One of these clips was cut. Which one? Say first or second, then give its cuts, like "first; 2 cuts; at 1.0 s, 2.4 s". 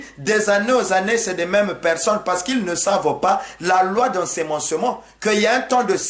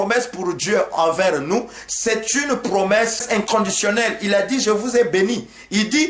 second; 1 cut; at 3.2 s